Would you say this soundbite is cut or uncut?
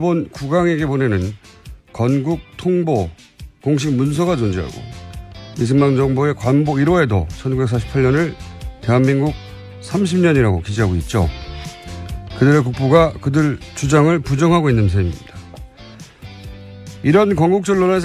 cut